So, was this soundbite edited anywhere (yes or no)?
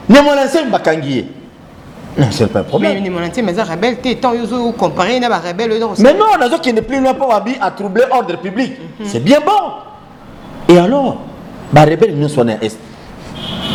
no